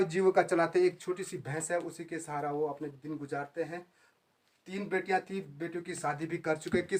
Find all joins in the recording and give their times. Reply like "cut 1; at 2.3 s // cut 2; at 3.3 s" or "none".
none